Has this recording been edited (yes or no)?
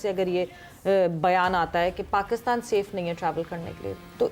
no